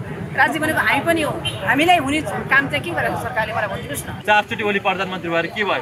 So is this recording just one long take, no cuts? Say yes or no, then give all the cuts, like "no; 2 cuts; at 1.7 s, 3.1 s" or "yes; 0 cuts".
no; 1 cut; at 4.2 s